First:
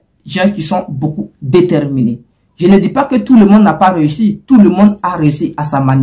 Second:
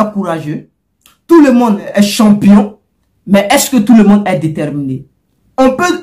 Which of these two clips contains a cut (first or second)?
second